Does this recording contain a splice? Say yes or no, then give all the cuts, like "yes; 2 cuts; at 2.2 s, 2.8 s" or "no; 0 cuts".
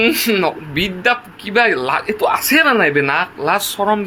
no; 0 cuts